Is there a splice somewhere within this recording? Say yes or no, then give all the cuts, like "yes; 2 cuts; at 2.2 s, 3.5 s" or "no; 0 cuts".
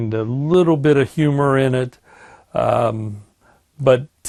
no; 0 cuts